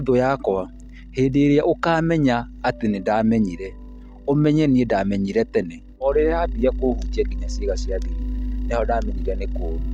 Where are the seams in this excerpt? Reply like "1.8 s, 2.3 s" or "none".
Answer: 6.0 s